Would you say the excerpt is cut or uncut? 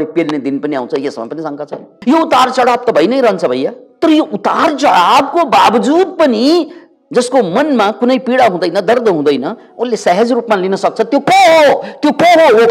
uncut